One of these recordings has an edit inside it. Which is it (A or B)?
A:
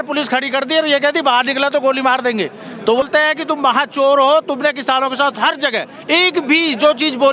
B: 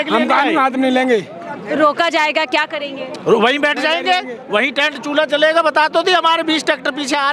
A